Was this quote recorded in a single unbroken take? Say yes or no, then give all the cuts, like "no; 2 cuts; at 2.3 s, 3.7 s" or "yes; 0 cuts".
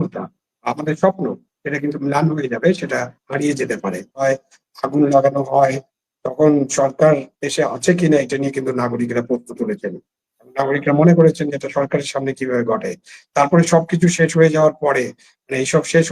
no; 1 cut; at 4.2 s